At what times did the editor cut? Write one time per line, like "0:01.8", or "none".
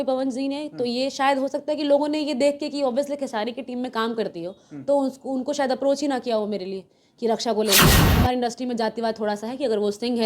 0:07.9